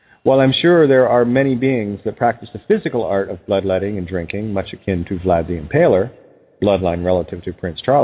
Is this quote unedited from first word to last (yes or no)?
no